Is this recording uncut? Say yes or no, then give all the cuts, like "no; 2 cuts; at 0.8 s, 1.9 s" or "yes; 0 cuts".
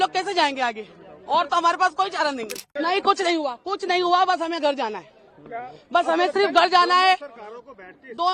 no; 1 cut; at 2.6 s